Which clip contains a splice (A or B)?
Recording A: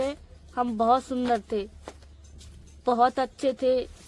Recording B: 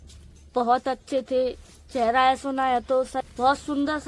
B